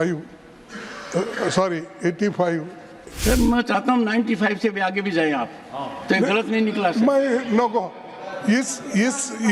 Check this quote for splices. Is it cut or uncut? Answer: cut